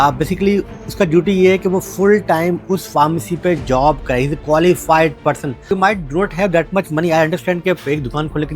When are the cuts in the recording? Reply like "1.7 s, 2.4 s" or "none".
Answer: 5.7 s